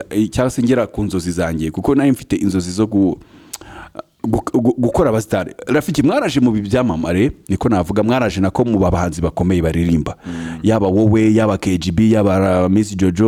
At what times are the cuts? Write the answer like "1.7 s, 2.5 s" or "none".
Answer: none